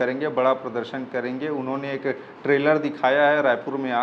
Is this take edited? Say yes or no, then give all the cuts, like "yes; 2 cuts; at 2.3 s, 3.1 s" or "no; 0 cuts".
no; 0 cuts